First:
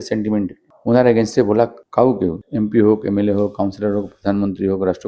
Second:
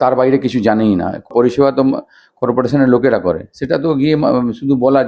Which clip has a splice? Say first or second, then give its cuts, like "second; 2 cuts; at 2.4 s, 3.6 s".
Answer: second; 1 cut; at 1.3 s